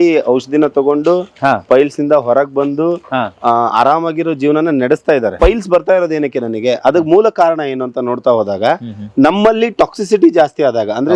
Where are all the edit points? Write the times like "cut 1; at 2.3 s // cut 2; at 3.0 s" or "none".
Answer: cut 1; at 5.3 s